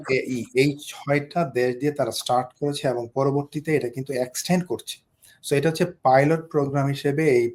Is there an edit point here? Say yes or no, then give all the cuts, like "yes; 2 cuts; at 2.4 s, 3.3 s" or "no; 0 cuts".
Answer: no; 0 cuts